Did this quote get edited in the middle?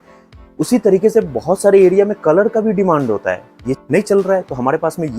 yes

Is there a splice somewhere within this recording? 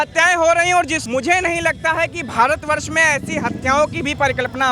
yes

